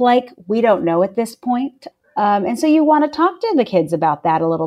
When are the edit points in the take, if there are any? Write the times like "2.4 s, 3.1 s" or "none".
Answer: 1.8 s